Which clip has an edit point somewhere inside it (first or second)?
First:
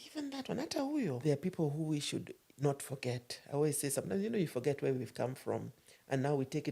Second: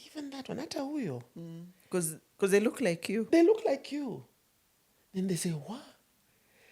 first